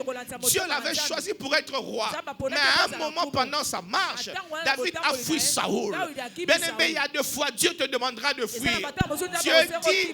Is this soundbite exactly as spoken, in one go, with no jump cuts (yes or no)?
yes